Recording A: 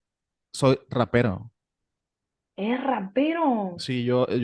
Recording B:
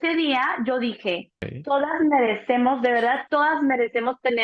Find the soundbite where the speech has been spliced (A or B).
B